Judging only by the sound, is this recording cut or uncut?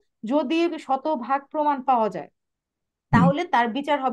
uncut